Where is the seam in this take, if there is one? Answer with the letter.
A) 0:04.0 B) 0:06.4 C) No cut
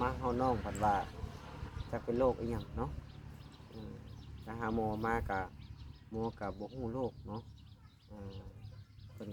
C